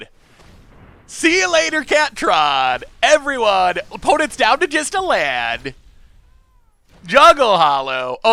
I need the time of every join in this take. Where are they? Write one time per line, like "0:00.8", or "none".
none